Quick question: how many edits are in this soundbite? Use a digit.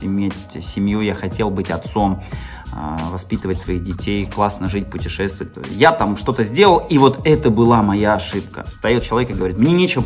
2